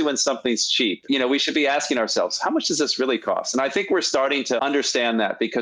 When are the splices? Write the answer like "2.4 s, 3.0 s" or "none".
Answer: 1.0 s

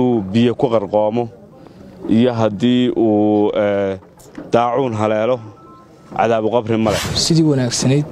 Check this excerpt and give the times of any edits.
7.1 s

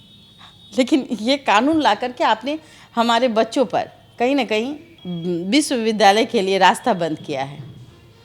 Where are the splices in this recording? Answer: none

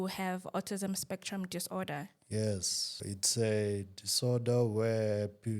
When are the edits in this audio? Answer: 3.0 s

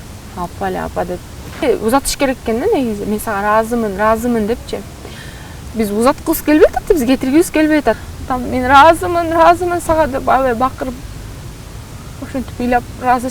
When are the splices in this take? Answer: 1.6 s, 8.0 s

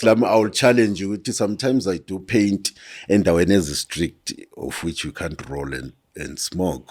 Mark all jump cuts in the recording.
none

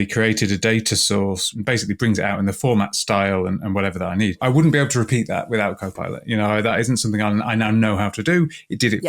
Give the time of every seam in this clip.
1.5 s, 4.4 s

